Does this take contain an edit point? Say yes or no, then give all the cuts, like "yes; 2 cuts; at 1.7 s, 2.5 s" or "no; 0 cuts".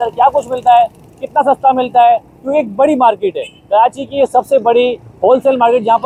no; 0 cuts